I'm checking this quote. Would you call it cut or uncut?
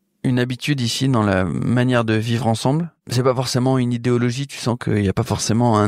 cut